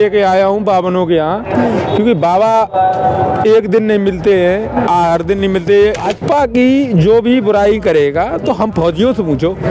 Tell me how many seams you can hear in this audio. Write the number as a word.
one